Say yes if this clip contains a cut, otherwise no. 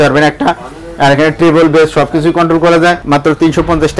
yes